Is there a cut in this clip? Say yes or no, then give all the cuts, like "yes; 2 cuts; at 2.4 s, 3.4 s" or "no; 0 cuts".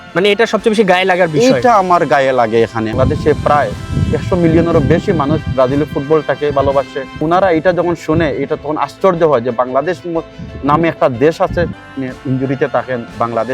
yes; 3 cuts; at 2.9 s, 7.2 s, 11.8 s